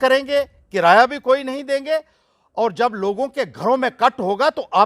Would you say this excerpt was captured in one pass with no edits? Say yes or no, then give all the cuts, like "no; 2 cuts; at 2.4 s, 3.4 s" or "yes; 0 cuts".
yes; 0 cuts